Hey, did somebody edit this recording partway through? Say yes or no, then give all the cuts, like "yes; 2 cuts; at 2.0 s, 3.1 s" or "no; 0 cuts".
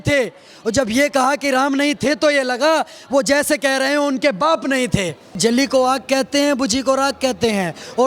yes; 1 cut; at 5.4 s